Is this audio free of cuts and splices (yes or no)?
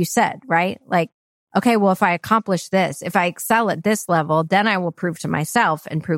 yes